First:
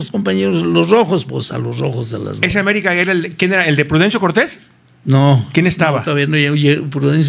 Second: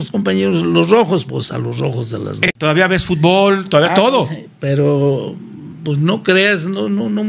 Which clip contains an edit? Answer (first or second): second